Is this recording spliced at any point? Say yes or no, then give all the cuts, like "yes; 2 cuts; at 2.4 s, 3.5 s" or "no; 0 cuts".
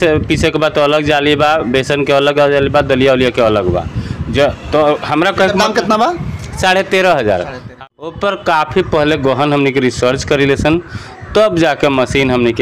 yes; 1 cut; at 7.8 s